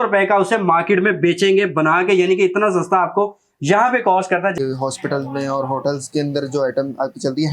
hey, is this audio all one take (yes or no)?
no